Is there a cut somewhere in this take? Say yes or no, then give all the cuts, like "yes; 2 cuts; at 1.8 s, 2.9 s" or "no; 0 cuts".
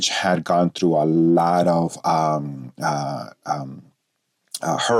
no; 0 cuts